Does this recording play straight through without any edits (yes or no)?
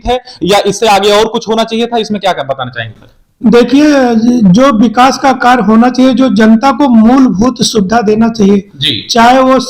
yes